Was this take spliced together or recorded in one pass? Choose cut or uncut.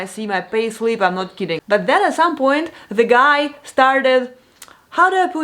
cut